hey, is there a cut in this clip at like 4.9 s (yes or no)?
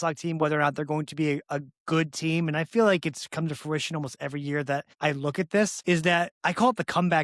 yes